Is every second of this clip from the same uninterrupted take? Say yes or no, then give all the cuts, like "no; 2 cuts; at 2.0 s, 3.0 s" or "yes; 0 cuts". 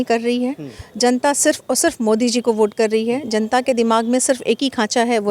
yes; 0 cuts